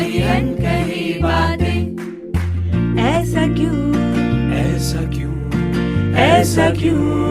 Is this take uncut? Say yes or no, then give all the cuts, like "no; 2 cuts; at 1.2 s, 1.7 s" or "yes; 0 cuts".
yes; 0 cuts